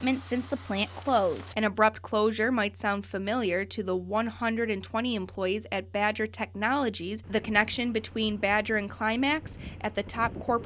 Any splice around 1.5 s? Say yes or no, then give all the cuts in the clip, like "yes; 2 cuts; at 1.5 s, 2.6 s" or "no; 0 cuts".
yes; 2 cuts; at 1.5 s, 7.2 s